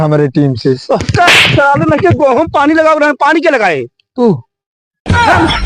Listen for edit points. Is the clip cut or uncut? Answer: uncut